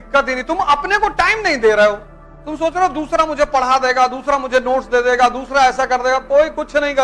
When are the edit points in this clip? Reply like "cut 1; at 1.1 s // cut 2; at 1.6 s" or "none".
none